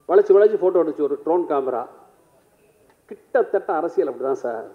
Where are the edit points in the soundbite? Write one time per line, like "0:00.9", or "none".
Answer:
none